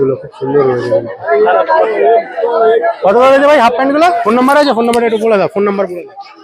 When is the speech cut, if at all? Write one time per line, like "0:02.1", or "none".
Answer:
0:04.2

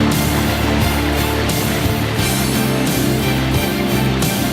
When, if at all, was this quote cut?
0:02.7

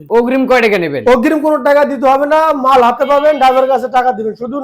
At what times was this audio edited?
none

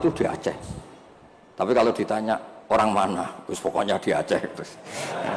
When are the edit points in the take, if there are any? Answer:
none

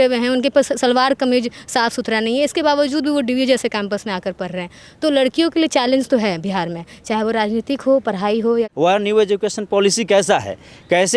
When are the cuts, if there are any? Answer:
0:08.7

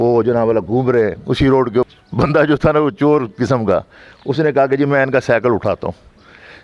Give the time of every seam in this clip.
0:01.9

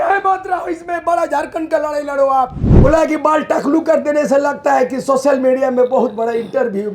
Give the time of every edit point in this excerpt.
0:02.6

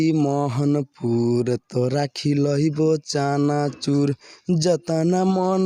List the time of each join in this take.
none

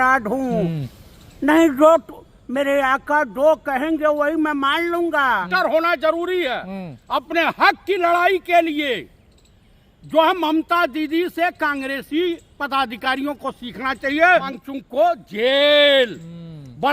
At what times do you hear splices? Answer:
0:05.5
0:14.6

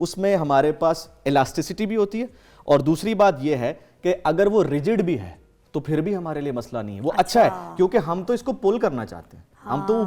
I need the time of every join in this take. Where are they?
none

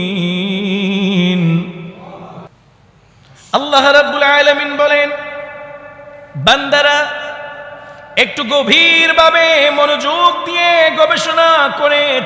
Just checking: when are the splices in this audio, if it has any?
0:02.5

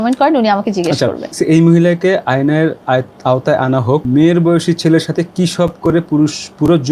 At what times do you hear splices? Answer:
0:01.4
0:04.1

